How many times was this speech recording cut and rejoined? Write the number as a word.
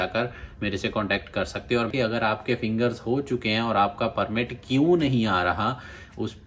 one